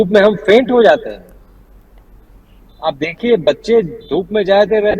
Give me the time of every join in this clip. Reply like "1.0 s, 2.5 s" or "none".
none